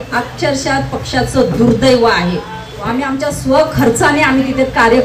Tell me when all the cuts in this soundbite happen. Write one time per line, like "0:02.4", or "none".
0:02.8